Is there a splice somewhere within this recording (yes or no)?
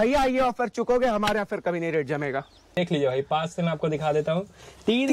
yes